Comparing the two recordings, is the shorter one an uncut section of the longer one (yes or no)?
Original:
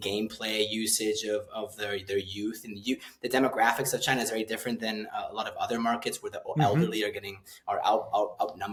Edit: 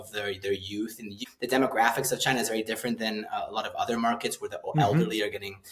no